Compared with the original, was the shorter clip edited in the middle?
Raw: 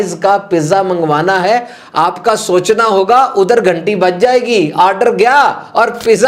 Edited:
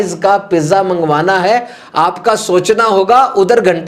no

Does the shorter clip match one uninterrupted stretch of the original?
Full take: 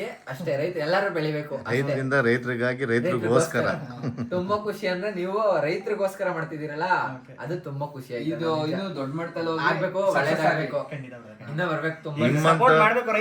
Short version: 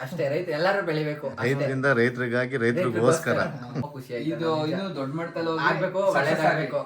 no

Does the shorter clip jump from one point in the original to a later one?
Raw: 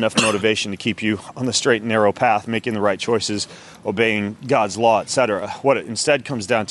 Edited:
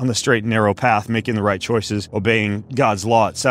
yes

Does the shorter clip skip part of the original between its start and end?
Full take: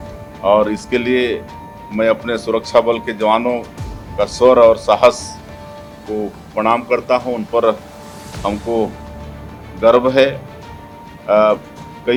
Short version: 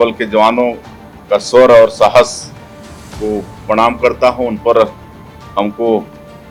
no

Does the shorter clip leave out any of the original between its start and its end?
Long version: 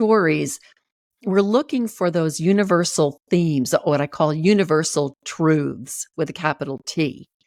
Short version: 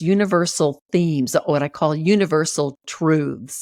no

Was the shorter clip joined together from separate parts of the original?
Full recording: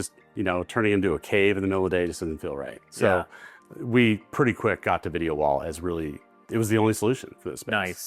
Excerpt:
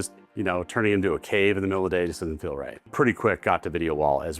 yes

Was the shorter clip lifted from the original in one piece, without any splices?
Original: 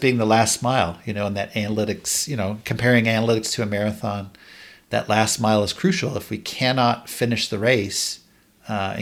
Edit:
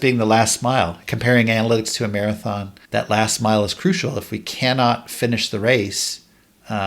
no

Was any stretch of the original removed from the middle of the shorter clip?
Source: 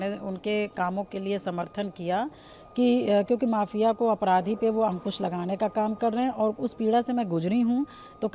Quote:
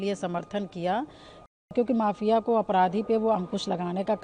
yes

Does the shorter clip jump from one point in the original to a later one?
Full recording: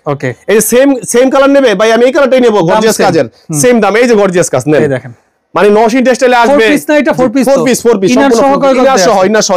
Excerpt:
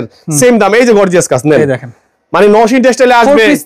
no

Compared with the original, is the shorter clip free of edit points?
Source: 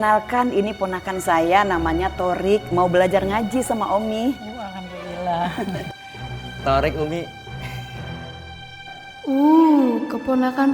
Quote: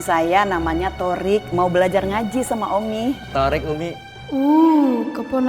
no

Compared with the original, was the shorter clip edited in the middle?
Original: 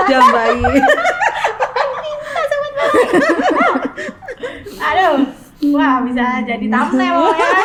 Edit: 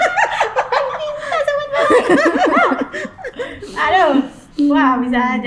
no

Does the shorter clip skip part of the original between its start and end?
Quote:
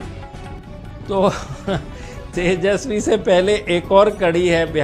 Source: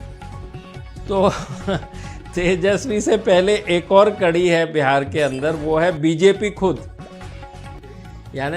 no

